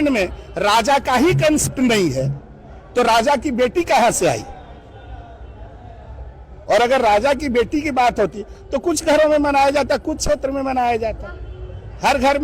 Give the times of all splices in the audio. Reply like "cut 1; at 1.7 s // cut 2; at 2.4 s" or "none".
cut 1; at 1.7 s